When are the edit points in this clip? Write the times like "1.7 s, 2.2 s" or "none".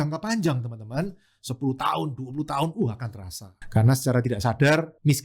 3.5 s